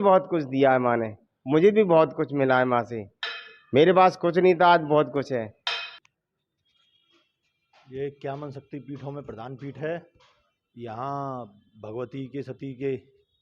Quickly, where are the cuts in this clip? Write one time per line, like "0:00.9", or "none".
0:05.9

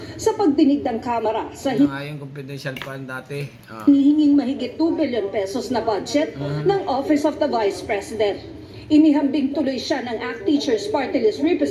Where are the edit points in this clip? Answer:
none

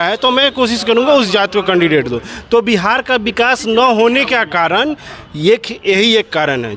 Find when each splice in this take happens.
none

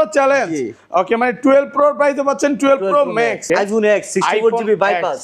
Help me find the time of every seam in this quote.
0:03.4

